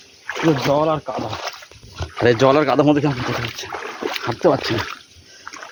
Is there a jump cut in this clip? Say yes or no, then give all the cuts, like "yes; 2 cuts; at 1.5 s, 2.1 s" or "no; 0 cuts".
no; 0 cuts